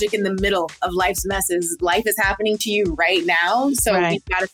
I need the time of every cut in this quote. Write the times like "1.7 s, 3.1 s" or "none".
none